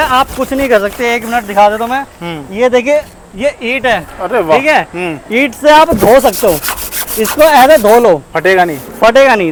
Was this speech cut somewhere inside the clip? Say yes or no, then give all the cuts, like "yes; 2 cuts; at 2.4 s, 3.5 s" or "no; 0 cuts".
no; 0 cuts